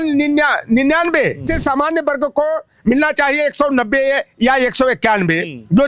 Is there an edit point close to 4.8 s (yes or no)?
no